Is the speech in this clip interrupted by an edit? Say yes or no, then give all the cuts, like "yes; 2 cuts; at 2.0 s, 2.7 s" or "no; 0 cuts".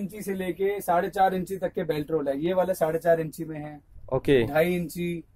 no; 0 cuts